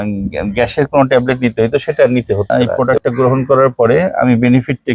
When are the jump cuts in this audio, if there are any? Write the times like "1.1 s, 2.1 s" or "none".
2.4 s